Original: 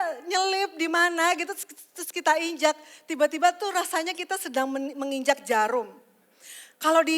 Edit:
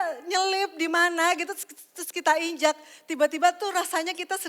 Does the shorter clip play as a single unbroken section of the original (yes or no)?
yes